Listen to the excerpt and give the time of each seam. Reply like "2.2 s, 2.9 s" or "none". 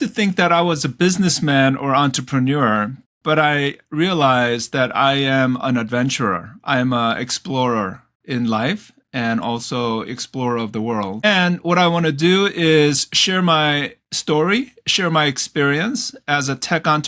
11.2 s